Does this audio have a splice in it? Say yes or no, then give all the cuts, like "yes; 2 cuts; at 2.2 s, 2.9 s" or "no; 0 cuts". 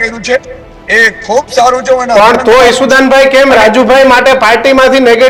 no; 0 cuts